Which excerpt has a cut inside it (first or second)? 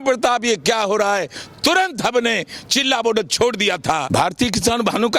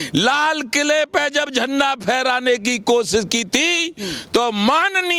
first